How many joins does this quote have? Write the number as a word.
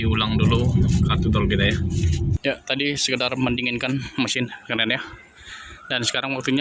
one